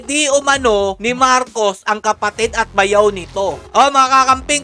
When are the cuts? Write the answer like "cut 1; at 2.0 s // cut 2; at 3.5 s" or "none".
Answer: cut 1; at 1.0 s // cut 2; at 3.6 s